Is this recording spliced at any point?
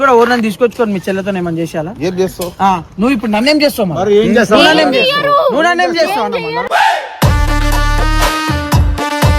no; 0 cuts

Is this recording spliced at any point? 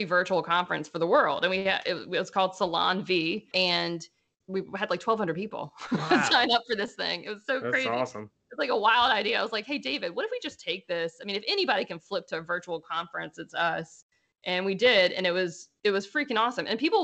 no; 0 cuts

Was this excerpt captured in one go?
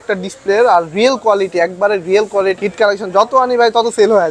no; 1 cut; at 2.6 s

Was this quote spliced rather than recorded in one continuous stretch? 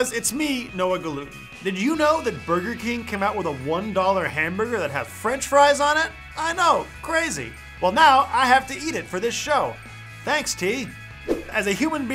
no; 0 cuts

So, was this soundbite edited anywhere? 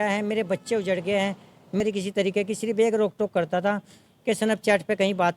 yes; 1 cut; at 1.8 s

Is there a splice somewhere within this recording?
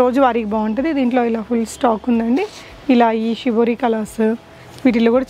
no; 0 cuts

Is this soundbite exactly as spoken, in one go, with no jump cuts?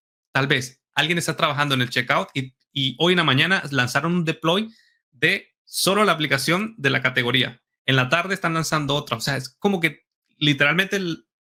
yes; 0 cuts

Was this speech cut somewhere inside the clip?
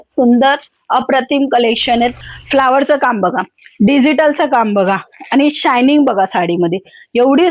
yes; 1 cut; at 2.3 s

